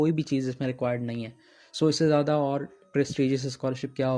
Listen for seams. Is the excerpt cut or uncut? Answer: uncut